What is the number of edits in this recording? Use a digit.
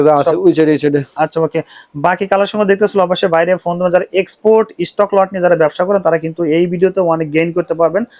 0